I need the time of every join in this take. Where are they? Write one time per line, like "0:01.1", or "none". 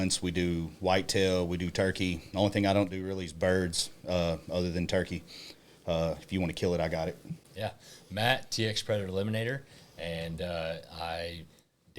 0:07.4